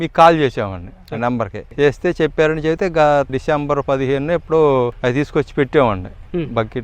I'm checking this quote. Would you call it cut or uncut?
cut